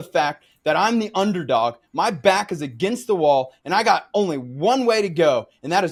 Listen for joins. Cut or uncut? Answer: uncut